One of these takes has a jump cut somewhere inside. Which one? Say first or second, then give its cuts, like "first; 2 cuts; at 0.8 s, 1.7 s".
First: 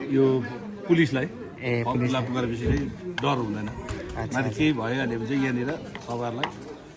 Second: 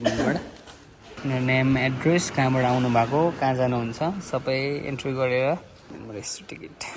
second; 2 cuts; at 1.2 s, 5.9 s